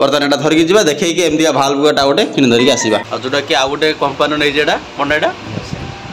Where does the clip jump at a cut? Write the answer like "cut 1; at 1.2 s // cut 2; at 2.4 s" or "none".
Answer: cut 1; at 3.1 s